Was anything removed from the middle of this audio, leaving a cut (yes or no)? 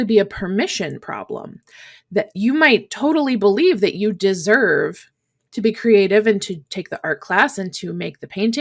no